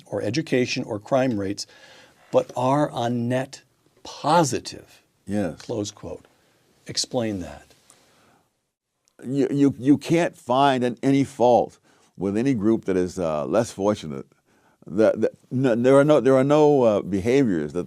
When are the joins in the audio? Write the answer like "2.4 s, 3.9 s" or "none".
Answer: 3.2 s

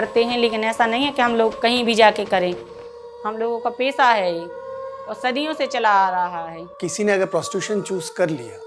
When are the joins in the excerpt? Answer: 6.6 s

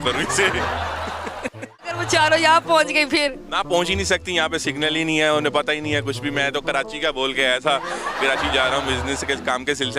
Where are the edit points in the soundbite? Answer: 2.1 s

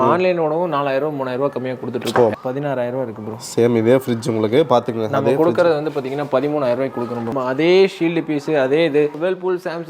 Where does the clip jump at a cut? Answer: 2.3 s, 7.3 s, 9.1 s

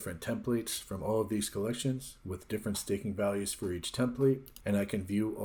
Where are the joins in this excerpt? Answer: none

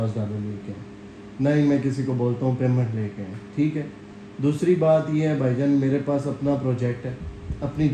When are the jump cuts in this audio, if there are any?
none

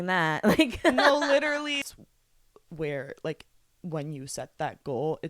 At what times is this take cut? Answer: 1.8 s

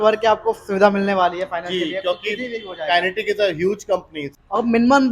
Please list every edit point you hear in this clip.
4.2 s

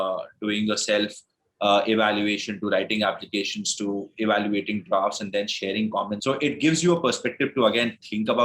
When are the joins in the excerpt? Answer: 6.2 s

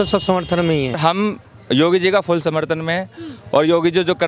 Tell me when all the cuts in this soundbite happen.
1.0 s

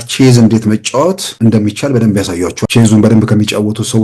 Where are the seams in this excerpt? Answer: 1.3 s, 2.6 s

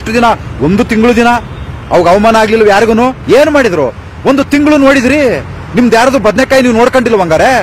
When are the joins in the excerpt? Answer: 3.2 s

